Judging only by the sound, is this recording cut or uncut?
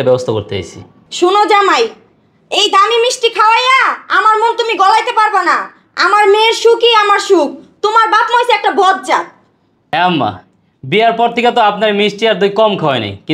uncut